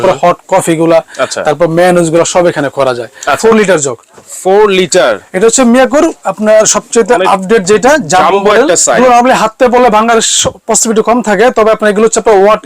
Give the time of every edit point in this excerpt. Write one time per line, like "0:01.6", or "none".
0:03.4
0:09.0